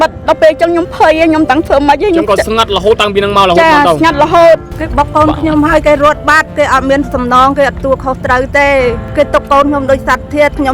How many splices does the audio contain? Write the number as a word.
two